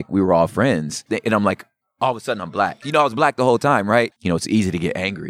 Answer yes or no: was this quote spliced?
yes